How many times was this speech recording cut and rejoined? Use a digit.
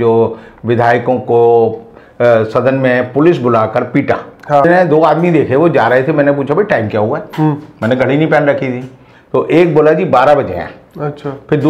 1